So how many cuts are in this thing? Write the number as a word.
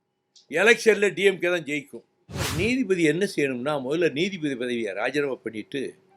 one